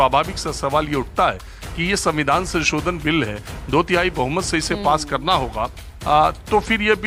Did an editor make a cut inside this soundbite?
no; 0 cuts

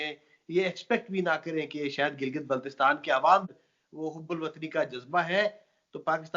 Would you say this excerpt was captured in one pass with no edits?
no; 1 cut; at 3.5 s

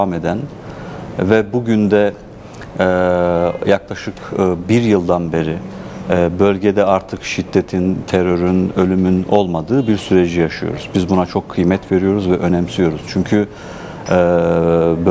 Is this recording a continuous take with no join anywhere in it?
yes; 0 cuts

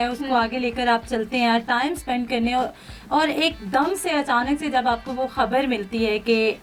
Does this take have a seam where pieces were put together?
no; 0 cuts

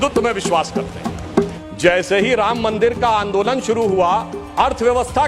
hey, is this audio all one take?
no; 1 cut; at 1.6 s

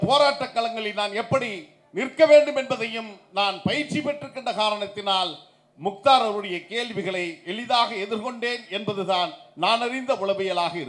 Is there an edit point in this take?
no; 0 cuts

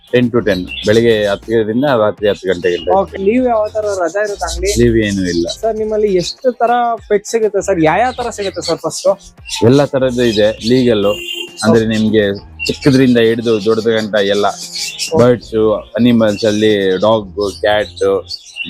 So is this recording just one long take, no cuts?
yes; 0 cuts

